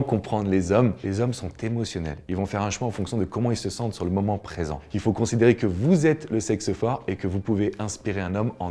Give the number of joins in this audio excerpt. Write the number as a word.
two